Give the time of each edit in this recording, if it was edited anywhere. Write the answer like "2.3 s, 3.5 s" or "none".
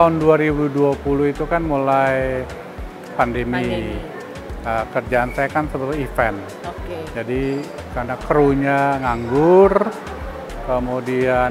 none

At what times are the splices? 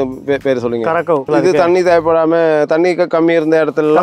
1.3 s

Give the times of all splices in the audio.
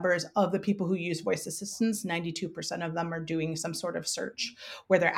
none

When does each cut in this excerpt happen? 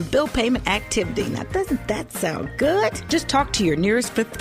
3.0 s

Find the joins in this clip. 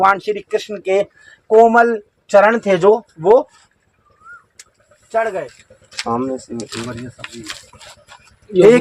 5.6 s

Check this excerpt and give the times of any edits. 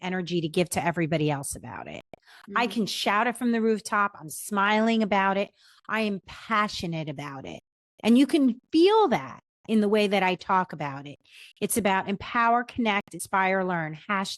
13.2 s

